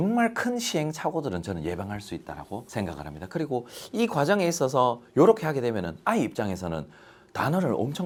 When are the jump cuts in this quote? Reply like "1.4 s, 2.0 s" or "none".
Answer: none